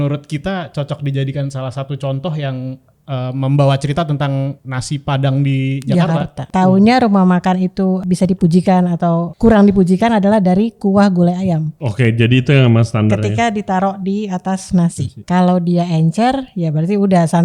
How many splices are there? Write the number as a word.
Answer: six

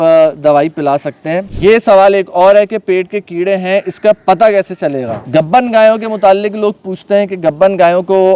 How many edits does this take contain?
two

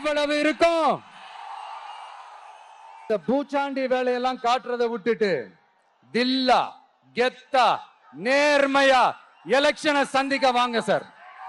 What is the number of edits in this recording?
one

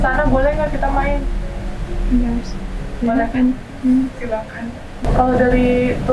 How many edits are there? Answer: one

